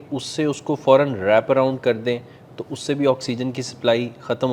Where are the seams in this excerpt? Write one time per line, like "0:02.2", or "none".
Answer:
none